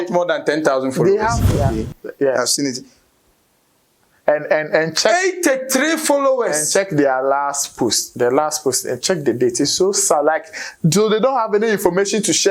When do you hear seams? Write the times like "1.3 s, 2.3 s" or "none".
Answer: 1.5 s